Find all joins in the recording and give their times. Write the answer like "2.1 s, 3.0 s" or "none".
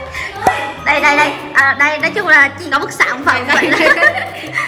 2.7 s